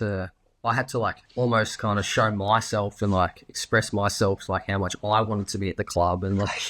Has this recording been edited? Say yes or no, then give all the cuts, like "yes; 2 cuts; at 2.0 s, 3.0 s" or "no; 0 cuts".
yes; 1 cut; at 1.2 s